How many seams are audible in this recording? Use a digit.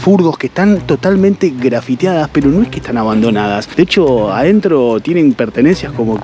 0